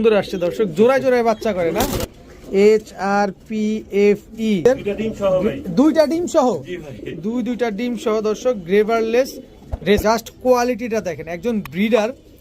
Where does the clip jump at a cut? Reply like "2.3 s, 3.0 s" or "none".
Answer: 2.1 s, 4.7 s, 10.0 s